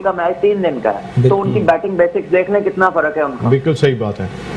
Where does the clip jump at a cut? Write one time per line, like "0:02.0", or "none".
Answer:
none